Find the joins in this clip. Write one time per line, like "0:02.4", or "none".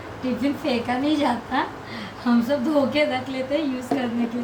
none